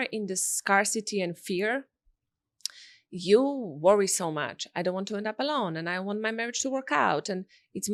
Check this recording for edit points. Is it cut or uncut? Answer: uncut